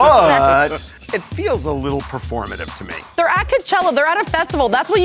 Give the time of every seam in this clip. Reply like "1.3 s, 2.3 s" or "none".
0.9 s, 3.1 s